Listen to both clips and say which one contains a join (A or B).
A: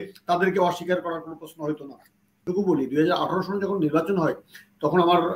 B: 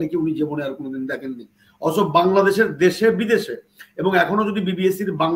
A